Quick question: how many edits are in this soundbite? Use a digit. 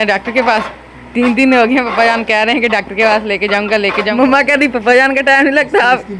1